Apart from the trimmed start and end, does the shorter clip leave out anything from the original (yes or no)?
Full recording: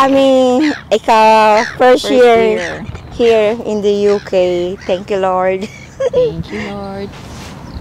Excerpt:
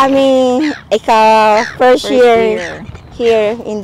no